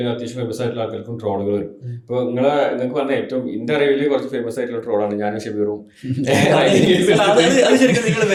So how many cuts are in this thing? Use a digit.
0